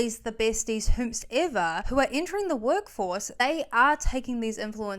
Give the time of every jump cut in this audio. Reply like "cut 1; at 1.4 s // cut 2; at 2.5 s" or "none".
cut 1; at 1.8 s // cut 2; at 3.4 s